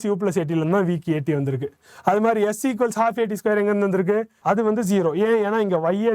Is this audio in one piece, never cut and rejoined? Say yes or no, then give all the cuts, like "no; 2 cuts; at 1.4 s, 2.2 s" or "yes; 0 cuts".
no; 1 cut; at 4.3 s